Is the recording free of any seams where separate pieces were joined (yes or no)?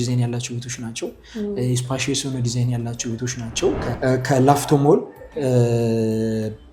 no